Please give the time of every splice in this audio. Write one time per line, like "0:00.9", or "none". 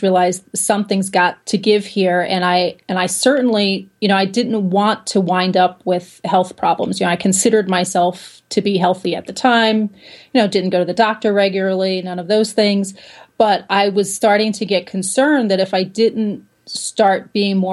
0:01.4